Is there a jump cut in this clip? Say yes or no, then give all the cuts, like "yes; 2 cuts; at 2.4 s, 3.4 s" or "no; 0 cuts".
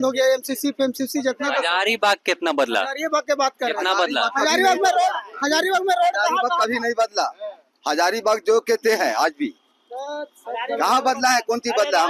no; 0 cuts